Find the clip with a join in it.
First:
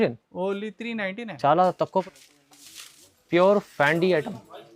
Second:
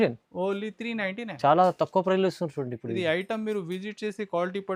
first; 1 cut; at 2.0 s

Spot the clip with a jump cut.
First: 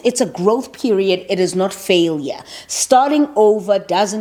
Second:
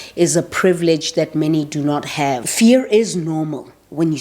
second; 1 cut; at 2.5 s

